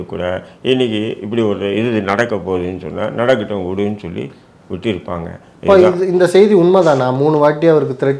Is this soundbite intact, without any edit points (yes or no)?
yes